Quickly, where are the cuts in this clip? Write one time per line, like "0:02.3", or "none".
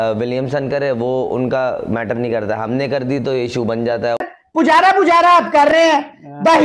0:04.2